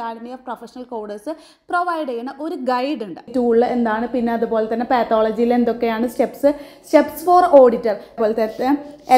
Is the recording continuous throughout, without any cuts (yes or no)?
no